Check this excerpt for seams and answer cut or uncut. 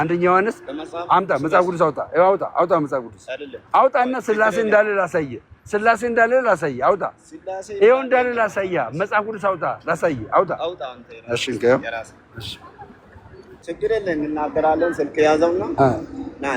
cut